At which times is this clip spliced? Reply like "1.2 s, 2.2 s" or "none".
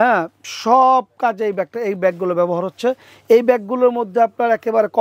none